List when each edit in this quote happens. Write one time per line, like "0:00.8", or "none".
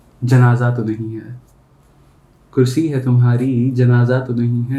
none